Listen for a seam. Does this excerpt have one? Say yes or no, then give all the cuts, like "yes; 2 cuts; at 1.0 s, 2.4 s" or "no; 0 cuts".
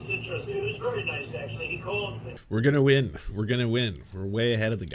yes; 1 cut; at 2.3 s